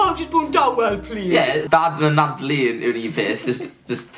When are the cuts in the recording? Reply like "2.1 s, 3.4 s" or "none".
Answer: 1.7 s